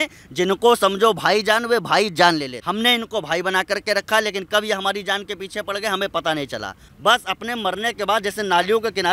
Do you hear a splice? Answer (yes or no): yes